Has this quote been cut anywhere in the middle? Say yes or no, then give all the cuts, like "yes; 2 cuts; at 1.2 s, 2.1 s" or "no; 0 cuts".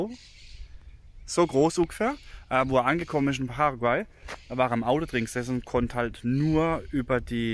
no; 0 cuts